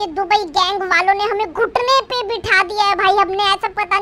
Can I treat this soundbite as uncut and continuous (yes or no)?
yes